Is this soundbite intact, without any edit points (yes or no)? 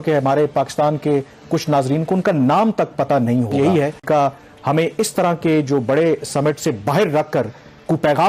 no